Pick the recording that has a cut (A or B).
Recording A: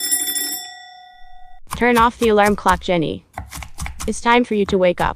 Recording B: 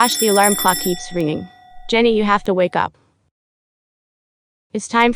A